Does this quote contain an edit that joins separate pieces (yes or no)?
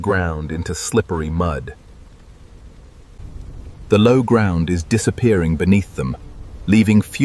yes